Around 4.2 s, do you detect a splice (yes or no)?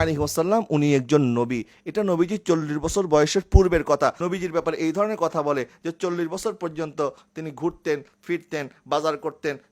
yes